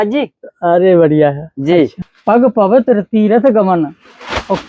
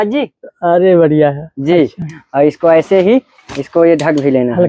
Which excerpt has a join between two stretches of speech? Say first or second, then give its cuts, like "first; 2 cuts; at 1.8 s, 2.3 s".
first; 1 cut; at 2.1 s